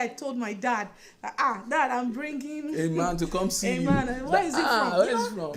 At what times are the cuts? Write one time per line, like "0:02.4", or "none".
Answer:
none